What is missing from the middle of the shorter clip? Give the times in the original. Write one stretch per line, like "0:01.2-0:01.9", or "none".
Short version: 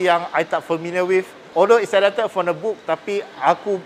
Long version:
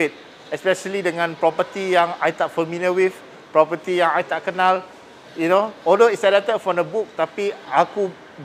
0:03.3-0:05.7